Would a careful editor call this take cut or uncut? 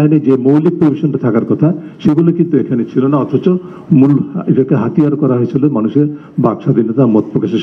uncut